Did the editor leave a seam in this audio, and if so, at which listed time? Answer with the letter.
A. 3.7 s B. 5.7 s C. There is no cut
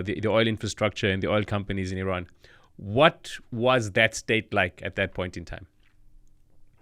C